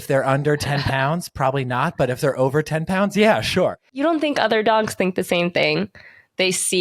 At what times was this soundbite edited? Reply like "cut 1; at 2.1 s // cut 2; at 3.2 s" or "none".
cut 1; at 3.9 s